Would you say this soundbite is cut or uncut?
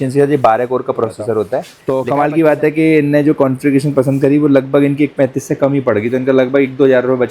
cut